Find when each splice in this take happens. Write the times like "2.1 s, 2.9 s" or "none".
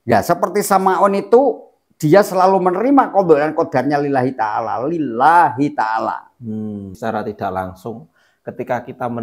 6.9 s